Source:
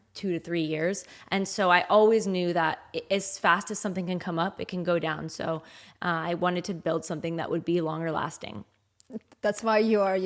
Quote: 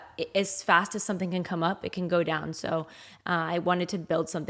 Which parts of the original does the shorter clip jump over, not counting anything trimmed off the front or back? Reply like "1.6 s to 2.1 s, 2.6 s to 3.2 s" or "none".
none